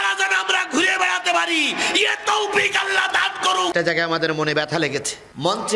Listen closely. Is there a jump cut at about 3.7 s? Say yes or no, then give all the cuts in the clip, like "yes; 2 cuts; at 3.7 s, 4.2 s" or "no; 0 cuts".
yes; 1 cut; at 3.7 s